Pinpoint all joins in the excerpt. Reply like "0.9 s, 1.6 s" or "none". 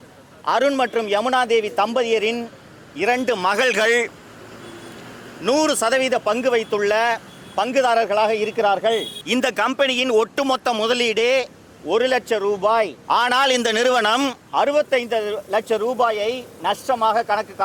9.2 s, 13.0 s, 14.4 s